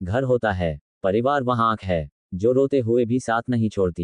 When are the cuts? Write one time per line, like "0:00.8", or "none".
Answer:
none